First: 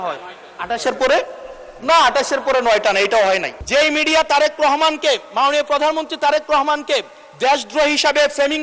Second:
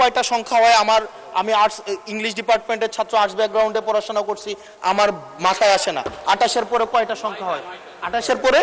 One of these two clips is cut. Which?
first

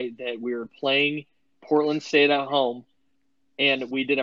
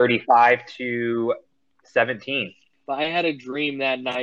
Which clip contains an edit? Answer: second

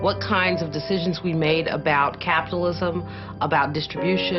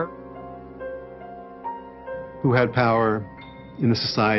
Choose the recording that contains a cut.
first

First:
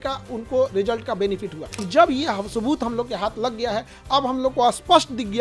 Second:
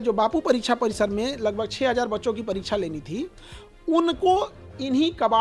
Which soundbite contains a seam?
first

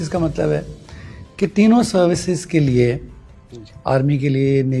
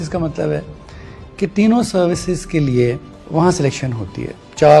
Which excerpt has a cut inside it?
second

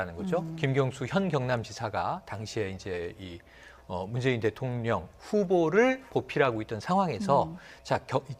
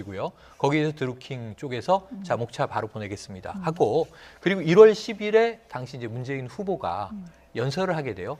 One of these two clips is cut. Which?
first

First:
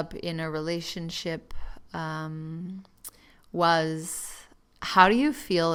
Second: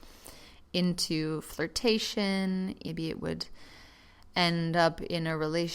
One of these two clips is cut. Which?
second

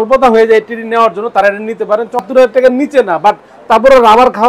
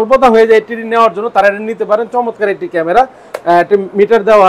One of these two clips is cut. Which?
first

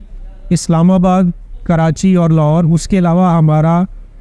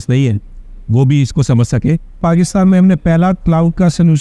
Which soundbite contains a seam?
second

